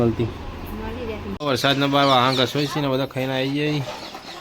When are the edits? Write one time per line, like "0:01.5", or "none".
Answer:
0:01.3